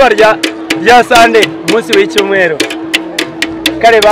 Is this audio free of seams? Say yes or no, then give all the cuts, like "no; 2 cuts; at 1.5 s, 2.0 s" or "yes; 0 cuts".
yes; 0 cuts